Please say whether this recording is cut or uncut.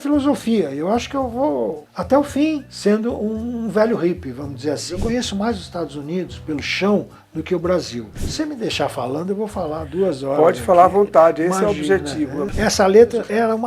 cut